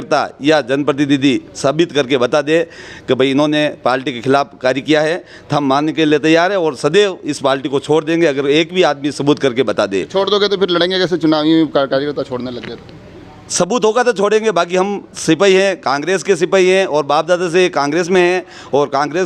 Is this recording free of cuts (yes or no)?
yes